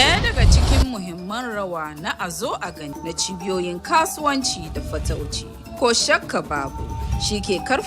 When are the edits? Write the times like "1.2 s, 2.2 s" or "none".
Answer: 2.9 s